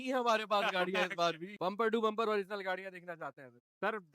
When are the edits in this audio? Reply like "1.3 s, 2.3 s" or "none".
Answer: 1.5 s